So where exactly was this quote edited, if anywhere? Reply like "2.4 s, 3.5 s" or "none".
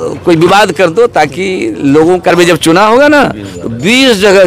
2.3 s